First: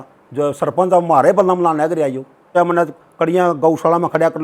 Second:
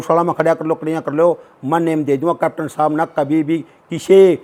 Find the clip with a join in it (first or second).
first